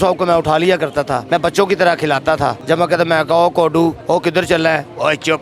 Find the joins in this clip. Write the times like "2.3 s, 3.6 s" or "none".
1.2 s, 2.6 s, 4.0 s

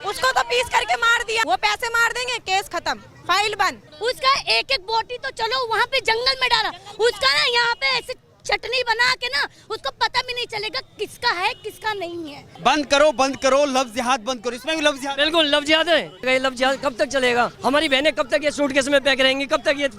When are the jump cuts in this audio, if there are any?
1.4 s, 3.9 s, 12.5 s, 16.2 s, 17.5 s

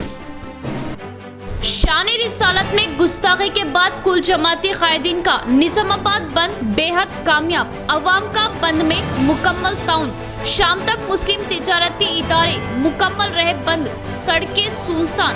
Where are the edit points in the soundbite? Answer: 0.9 s

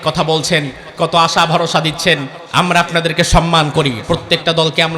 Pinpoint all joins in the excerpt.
2.4 s

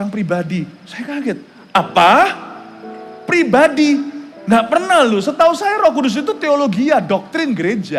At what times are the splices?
none

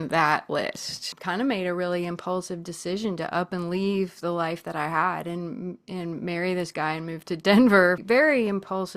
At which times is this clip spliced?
1.1 s, 8.0 s

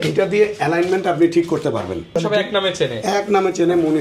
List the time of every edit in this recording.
2.2 s

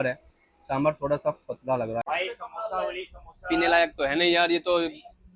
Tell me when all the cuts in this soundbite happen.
2.0 s

